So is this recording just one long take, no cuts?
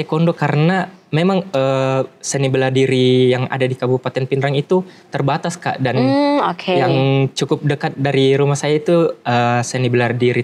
yes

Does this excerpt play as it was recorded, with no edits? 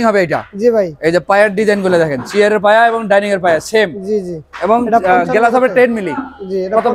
yes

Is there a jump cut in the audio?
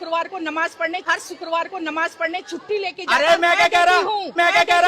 no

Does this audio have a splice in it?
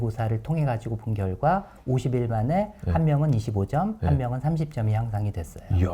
no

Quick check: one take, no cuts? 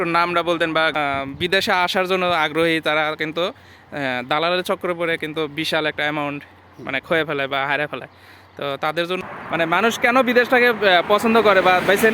no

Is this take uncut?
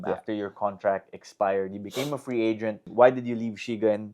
no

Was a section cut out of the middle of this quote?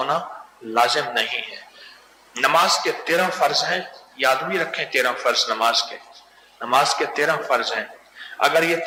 no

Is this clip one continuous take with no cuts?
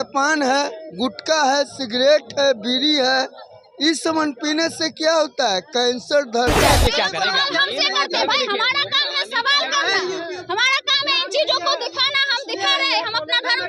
no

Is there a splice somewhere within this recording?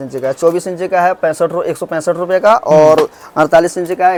no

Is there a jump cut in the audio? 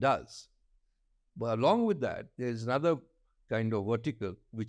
no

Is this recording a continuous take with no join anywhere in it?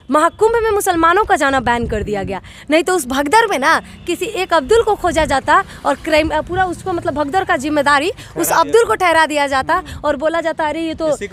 yes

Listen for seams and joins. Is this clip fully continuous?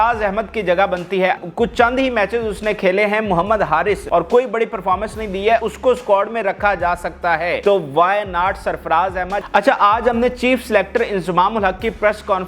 no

